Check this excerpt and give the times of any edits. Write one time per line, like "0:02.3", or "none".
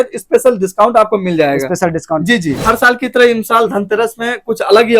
0:02.6